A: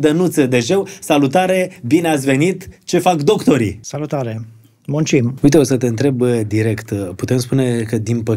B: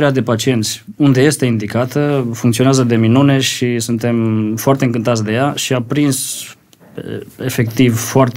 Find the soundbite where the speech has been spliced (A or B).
A